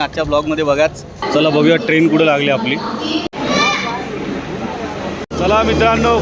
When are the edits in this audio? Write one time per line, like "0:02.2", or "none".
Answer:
0:01.2
0:05.3

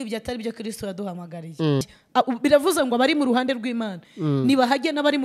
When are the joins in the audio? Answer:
0:01.8

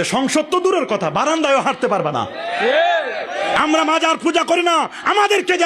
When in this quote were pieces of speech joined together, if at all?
0:03.2

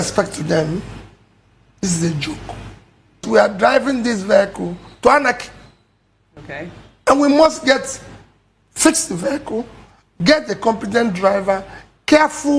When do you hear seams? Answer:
0:03.2

